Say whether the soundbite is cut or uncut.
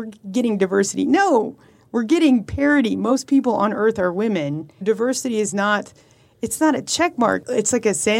cut